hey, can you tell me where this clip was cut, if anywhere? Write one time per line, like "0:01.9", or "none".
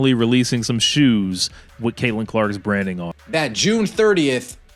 none